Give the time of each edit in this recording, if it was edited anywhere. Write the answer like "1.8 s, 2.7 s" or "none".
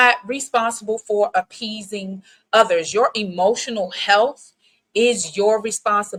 none